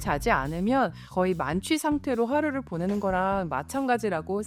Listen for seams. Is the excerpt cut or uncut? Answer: uncut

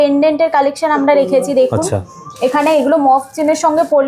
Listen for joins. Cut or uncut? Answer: uncut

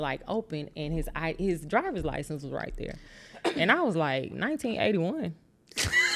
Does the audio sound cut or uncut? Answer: uncut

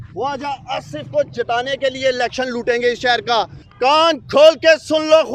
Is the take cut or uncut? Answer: cut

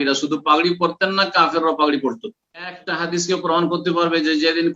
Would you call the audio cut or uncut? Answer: cut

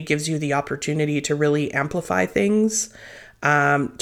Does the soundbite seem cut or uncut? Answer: uncut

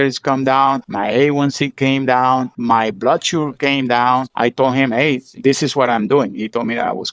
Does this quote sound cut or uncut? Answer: cut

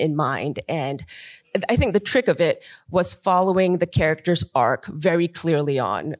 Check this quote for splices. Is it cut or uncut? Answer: cut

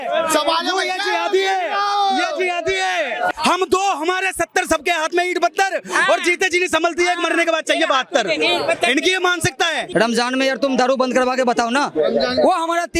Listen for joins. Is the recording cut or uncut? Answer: cut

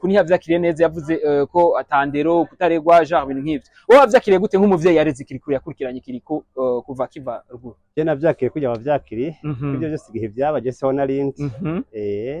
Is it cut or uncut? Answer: uncut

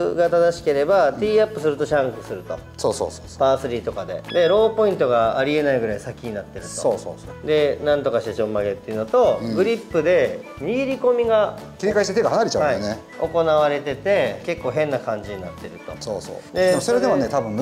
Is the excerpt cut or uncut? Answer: uncut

